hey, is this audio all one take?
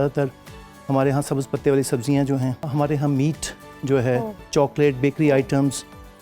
no; 2 cuts; at 2.7 s, 4.4 s

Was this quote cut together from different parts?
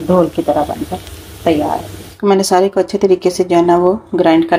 yes; 1 cut; at 2.0 s

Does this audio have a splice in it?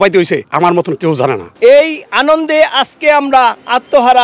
yes; 1 cut; at 1.5 s

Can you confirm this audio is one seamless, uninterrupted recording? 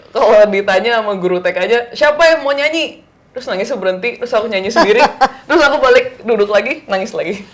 yes; 0 cuts

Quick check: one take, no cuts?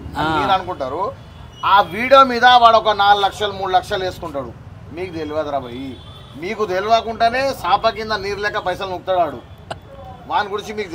yes; 0 cuts

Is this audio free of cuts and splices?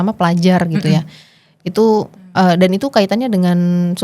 yes; 0 cuts

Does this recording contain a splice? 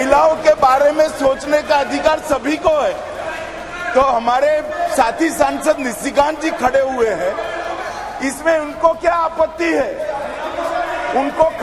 no; 0 cuts

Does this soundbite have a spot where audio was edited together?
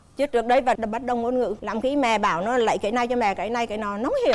no; 0 cuts

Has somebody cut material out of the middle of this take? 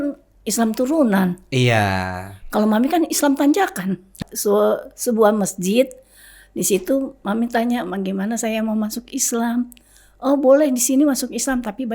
yes; 1 cut; at 4.1 s

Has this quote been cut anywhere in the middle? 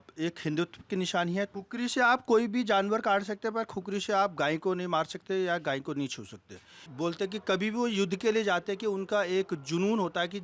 yes; 2 cuts; at 1.5 s, 6.8 s

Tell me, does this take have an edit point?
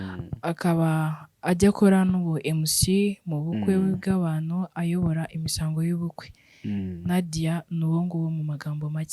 no; 0 cuts

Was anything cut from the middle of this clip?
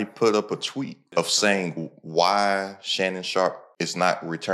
yes; 2 cuts; at 1.0 s, 3.7 s

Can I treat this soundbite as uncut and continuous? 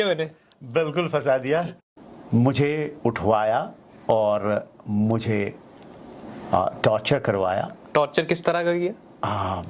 no; 1 cut; at 1.8 s

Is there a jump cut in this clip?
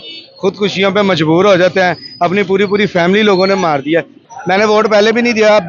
yes; 1 cut; at 4.2 s

